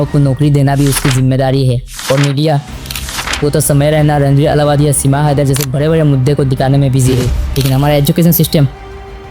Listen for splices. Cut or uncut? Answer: cut